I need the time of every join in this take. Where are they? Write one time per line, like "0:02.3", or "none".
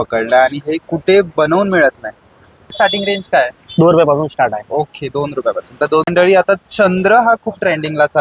0:02.7
0:06.1